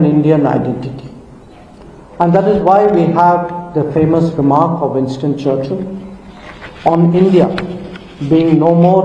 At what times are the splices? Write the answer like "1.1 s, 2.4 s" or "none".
none